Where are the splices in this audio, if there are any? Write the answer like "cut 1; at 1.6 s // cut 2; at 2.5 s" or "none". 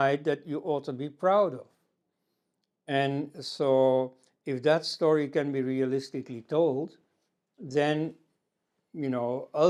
none